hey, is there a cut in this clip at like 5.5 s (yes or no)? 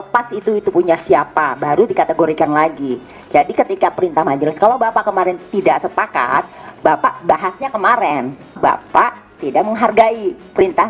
no